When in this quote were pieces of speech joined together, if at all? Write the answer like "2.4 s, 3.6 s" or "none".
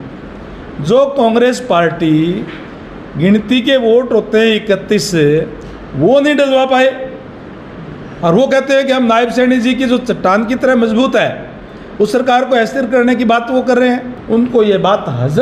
14.1 s

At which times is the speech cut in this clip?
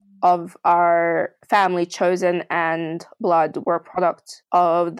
none

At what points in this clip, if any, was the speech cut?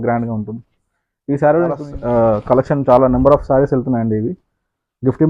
1.9 s

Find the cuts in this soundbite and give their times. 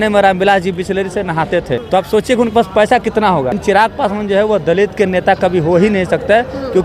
1.8 s, 3.6 s

